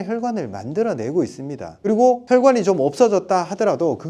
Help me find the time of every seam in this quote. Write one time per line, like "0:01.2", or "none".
0:02.0